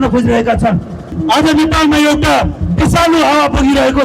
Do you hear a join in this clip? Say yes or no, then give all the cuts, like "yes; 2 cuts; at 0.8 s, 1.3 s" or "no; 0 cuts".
yes; 1 cut; at 1.1 s